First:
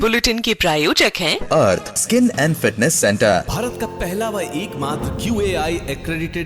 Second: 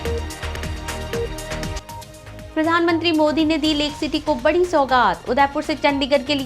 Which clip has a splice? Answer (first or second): second